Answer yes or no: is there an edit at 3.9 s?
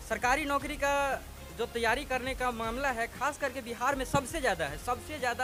no